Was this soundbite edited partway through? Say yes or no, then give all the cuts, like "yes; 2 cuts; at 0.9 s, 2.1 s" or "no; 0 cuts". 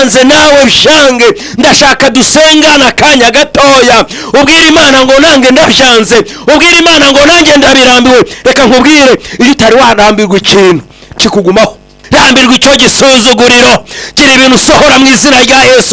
yes; 1 cut; at 11.9 s